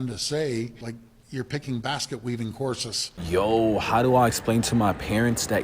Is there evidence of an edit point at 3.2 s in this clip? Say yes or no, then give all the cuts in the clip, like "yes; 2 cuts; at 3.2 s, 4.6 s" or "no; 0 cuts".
yes; 1 cut; at 3.2 s